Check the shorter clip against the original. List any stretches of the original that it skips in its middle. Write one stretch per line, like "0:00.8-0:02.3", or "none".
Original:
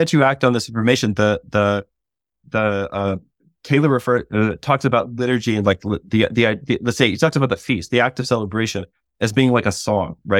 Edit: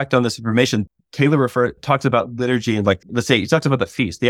0:01.1-0:03.4
0:04.3-0:04.6
0:05.9-0:06.8